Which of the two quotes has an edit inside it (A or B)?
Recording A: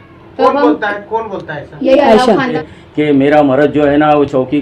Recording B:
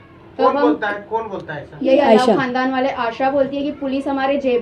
A